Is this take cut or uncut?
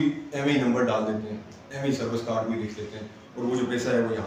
uncut